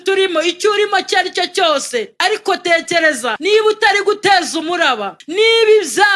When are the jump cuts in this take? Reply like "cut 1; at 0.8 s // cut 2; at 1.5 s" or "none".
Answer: cut 1; at 2.2 s // cut 2; at 3.3 s // cut 3; at 5.1 s